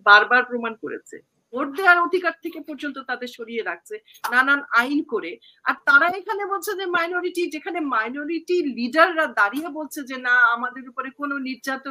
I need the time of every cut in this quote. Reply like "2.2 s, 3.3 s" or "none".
1.5 s